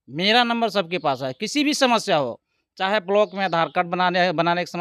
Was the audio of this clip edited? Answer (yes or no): no